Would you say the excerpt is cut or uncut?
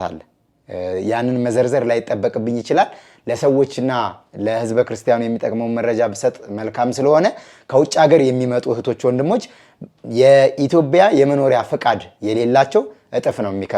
uncut